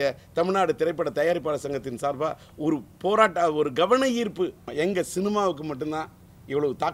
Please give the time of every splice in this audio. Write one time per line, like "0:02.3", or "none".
0:04.6